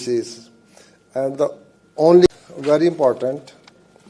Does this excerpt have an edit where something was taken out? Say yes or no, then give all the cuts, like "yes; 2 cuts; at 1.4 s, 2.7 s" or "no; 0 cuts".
yes; 1 cut; at 2.3 s